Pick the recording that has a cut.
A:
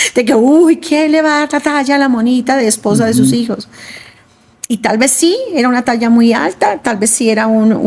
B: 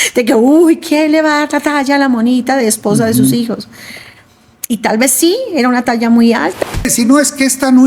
B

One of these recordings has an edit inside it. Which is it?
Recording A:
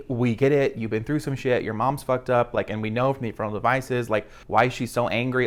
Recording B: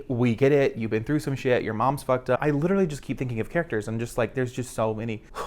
B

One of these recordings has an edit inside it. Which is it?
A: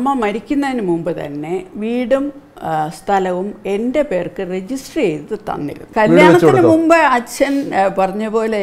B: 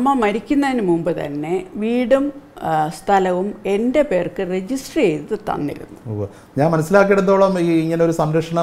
A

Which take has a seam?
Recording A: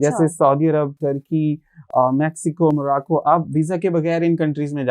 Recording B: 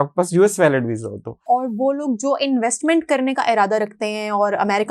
B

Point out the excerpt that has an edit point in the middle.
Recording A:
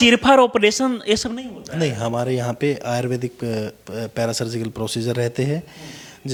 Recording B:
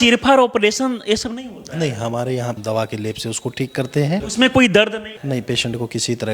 B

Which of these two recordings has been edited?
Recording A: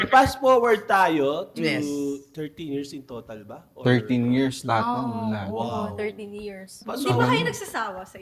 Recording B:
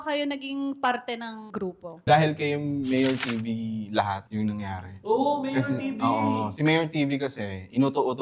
B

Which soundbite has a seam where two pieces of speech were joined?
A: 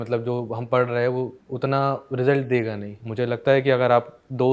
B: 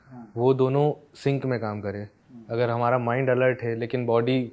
A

